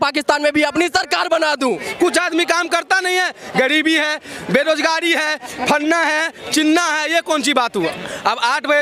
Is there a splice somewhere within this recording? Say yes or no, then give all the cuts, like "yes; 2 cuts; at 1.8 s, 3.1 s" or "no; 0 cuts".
yes; 2 cuts; at 1.8 s, 7.9 s